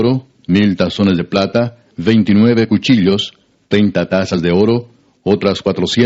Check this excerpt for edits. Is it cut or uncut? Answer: cut